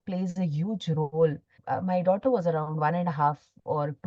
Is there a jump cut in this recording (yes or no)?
yes